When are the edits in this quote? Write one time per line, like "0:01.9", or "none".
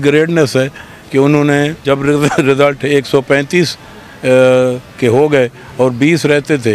0:01.8

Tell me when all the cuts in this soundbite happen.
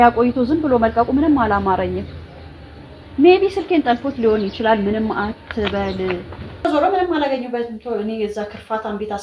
0:06.6

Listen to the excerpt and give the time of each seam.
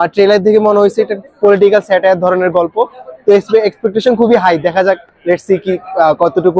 none

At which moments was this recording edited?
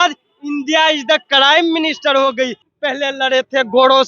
0:02.7

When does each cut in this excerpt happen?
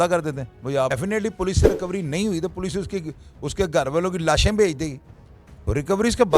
0:00.9

